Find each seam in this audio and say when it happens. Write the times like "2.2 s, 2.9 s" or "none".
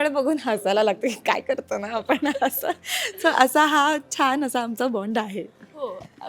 none